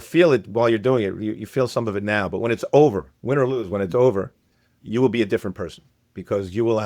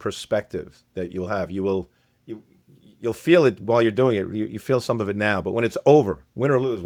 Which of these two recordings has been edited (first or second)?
first